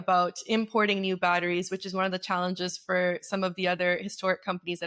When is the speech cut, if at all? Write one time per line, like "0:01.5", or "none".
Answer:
none